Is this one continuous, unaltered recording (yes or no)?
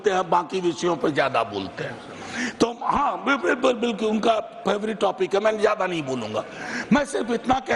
yes